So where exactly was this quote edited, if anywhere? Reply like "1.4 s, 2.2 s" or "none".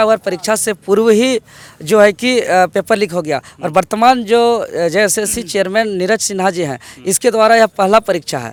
none